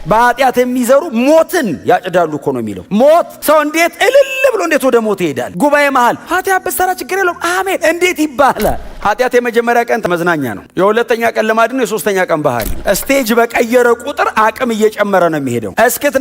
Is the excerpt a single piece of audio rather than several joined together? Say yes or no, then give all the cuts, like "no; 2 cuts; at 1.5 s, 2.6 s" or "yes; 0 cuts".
no; 2 cuts; at 8.9 s, 10.0 s